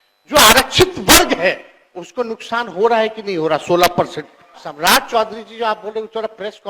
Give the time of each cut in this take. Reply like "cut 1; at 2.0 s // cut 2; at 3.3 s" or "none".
cut 1; at 4.6 s